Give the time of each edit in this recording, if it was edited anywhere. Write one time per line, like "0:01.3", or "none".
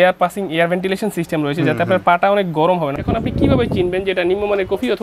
0:03.0

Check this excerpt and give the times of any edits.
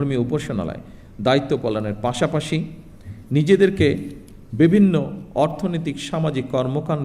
none

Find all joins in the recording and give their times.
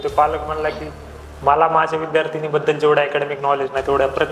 none

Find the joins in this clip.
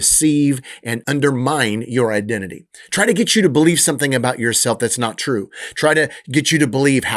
0:00.9

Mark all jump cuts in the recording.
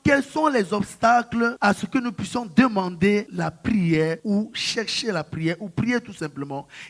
0:01.6
0:03.3
0:04.2

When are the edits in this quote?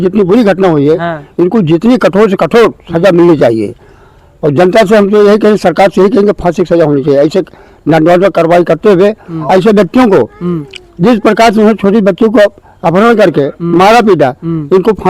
none

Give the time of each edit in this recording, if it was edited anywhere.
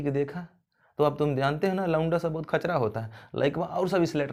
none

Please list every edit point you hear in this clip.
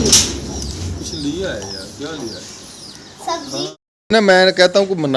0:03.7

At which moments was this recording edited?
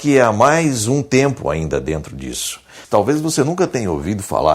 0:02.8

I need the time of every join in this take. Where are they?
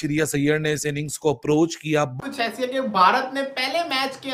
0:02.1

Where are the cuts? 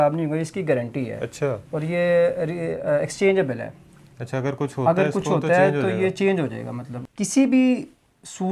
0:06.9

